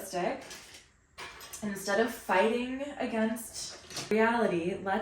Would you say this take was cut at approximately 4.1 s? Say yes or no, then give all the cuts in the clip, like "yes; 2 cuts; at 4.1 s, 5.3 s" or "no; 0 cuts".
yes; 1 cut; at 4.1 s